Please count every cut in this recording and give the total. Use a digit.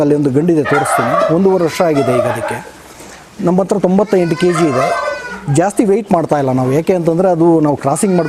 0